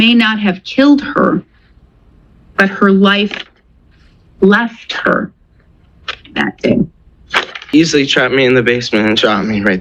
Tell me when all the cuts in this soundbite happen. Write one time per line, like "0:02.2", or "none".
0:07.7